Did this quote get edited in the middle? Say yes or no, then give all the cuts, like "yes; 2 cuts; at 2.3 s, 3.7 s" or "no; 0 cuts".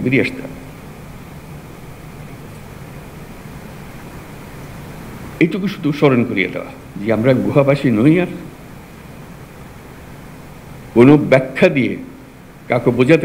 no; 0 cuts